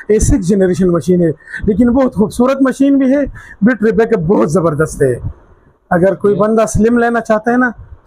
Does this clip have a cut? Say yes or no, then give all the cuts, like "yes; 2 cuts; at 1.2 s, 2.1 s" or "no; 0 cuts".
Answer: no; 0 cuts